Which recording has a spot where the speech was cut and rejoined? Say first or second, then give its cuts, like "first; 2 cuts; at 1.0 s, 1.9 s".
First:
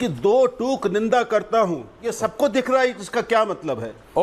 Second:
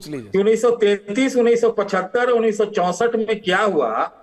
first; 1 cut; at 2.1 s